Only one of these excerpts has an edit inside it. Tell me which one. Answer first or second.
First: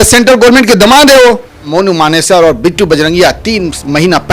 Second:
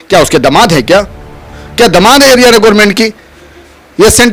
first